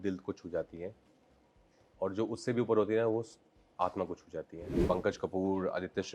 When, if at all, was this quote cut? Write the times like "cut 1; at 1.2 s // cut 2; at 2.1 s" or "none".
cut 1; at 4.8 s